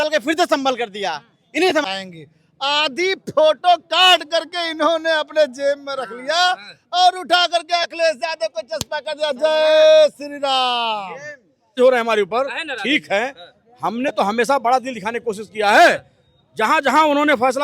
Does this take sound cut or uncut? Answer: cut